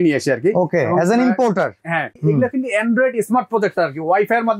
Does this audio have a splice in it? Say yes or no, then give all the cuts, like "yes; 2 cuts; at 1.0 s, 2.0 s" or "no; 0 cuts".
yes; 1 cut; at 2.1 s